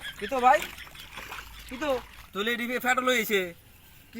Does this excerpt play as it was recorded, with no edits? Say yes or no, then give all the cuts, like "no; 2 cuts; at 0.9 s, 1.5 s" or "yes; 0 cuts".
no; 1 cut; at 2.2 s